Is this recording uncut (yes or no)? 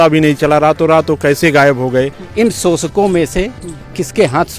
no